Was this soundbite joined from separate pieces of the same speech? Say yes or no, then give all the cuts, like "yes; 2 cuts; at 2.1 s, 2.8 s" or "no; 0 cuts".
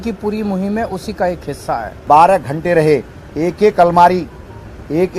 yes; 1 cut; at 2.0 s